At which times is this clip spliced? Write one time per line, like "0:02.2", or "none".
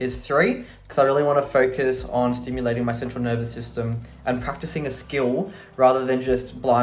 none